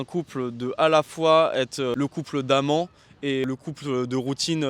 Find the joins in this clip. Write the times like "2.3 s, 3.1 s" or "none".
1.9 s, 3.4 s